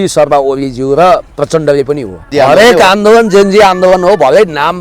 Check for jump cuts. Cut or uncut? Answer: cut